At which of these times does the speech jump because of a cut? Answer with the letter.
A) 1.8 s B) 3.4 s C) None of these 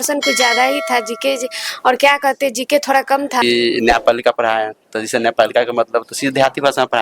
B